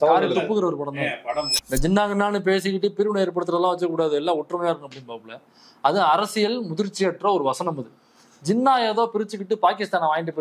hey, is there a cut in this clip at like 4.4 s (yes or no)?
no